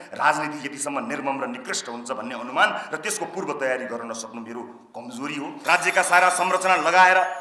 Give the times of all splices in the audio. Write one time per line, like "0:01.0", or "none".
0:05.6